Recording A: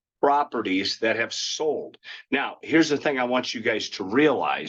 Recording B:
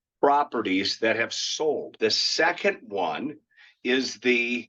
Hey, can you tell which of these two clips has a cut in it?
B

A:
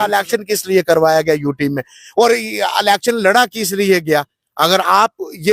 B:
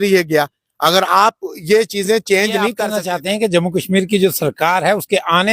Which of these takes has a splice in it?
B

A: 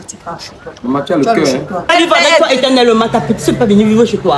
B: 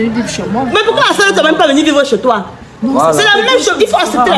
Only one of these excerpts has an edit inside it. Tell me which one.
A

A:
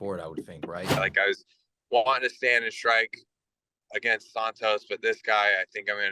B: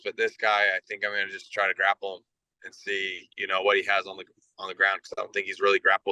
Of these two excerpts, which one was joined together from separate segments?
A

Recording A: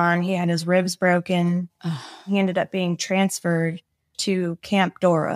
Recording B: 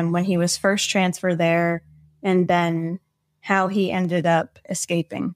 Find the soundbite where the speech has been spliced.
A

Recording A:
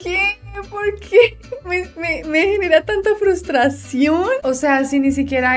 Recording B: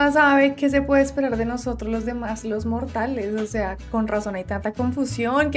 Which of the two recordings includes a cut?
A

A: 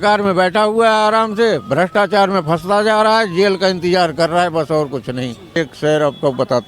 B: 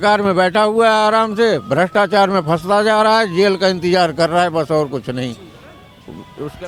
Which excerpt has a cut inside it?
A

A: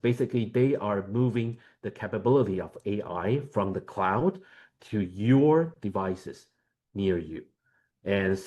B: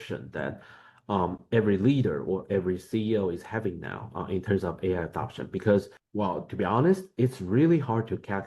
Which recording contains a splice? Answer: B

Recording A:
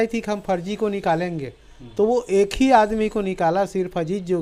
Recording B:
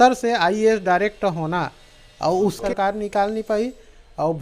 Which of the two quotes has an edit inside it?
B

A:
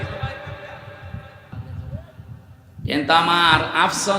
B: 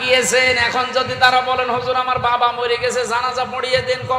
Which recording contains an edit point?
A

